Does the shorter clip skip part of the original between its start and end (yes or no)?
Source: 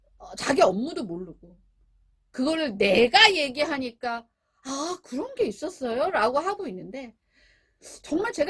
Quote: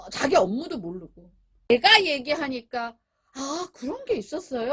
yes